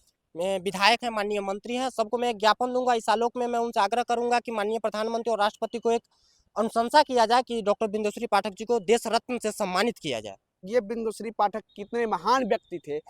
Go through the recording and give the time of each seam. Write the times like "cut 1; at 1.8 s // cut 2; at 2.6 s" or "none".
cut 1; at 10.7 s